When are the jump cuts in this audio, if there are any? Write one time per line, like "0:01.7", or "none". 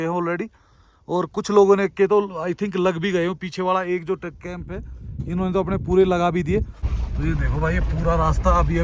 0:06.8